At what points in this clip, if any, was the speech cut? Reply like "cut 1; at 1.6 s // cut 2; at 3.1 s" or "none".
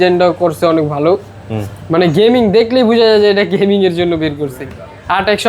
none